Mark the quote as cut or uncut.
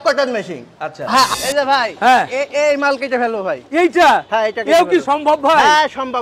cut